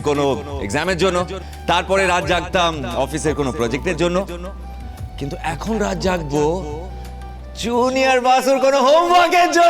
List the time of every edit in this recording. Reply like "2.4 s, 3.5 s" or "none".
none